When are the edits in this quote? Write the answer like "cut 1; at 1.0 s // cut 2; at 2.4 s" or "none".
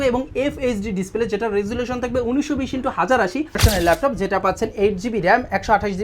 cut 1; at 3.6 s